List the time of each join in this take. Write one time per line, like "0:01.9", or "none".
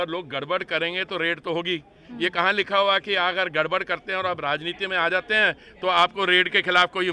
none